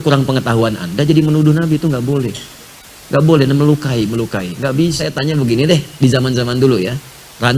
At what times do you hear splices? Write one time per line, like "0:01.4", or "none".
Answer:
0:05.0